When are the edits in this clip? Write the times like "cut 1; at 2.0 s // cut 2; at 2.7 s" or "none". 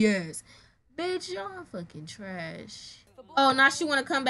cut 1; at 3.2 s